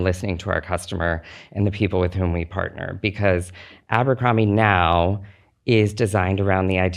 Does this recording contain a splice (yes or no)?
no